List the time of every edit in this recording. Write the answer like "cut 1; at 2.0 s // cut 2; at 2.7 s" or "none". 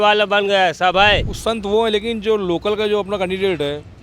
cut 1; at 1.3 s

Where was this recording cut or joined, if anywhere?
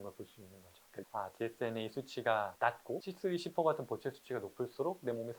cut 1; at 0.9 s

